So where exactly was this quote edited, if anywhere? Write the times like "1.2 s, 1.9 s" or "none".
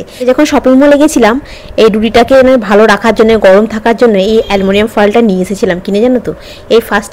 none